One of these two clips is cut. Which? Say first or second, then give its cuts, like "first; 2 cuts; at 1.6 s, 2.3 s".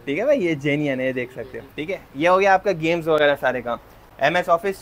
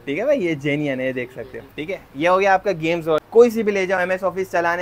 second; 1 cut; at 3.2 s